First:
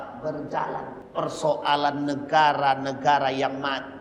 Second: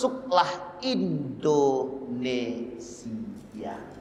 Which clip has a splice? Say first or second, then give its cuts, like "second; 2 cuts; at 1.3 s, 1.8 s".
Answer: first; 1 cut; at 1.0 s